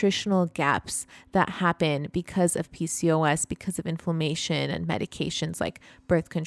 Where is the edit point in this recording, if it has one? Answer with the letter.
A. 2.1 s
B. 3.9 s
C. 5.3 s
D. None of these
D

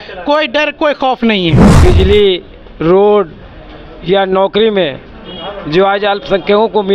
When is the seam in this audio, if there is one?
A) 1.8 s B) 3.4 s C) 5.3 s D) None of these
A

